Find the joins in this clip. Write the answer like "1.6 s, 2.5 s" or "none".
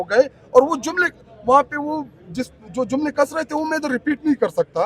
none